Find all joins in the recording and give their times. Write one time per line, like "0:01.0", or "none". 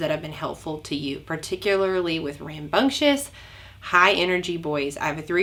none